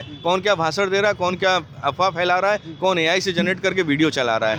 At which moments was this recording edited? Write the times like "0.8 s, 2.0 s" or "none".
none